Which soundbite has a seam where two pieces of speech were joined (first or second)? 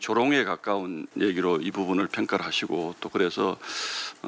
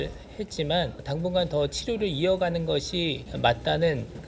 second